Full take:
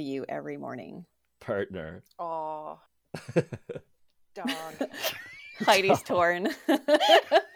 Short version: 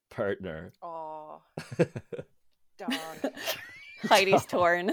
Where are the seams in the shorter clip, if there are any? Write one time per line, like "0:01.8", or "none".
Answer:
0:01.0